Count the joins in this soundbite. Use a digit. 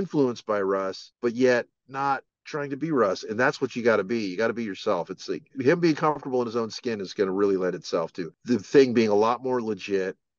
4